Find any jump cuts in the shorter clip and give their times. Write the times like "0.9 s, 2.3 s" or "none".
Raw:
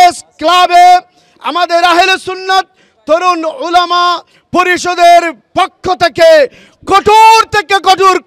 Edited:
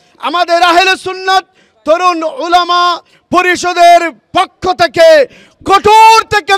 none

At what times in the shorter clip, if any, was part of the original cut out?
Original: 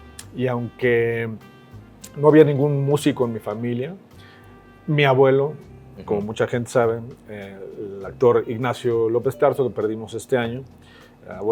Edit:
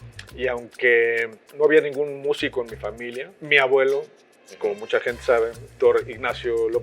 1.4 s, 3.4 s, 5.6 s

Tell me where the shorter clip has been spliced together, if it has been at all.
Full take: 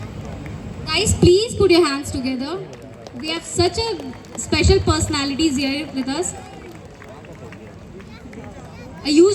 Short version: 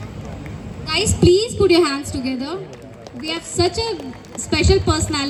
none

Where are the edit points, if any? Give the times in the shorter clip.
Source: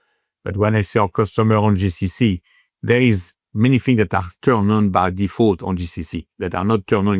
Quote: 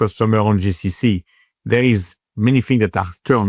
none

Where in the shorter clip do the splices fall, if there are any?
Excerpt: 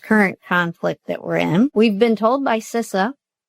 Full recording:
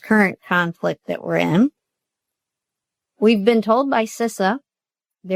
1.7 s

